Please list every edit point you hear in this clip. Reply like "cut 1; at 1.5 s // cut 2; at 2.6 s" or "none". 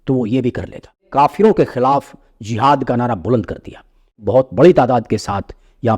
cut 1; at 1.0 s // cut 2; at 4.2 s